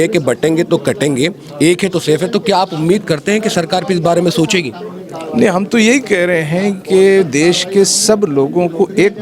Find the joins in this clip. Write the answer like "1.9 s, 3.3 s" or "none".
none